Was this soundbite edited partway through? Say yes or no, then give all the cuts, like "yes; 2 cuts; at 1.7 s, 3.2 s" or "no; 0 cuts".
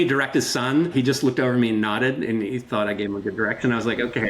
yes; 1 cut; at 0.9 s